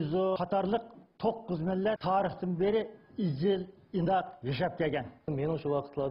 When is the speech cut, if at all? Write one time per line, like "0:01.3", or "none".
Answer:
0:05.2